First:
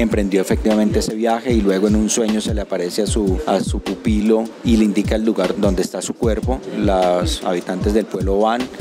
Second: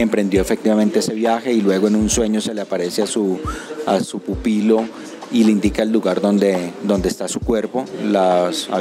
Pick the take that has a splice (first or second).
first